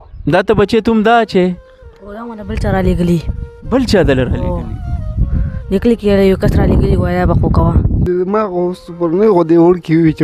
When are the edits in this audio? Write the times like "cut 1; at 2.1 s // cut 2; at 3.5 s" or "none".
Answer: cut 1; at 8.0 s